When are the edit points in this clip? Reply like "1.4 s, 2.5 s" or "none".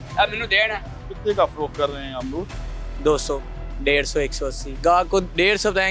0.9 s, 4.7 s